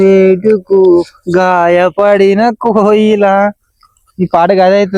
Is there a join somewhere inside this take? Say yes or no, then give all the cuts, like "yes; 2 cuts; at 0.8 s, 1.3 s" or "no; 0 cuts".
no; 0 cuts